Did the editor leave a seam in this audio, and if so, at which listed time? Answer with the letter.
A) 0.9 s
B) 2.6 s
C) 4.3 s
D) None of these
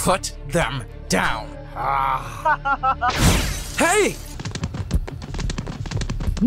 C